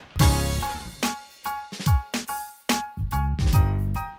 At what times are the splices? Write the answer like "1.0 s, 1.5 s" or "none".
3.0 s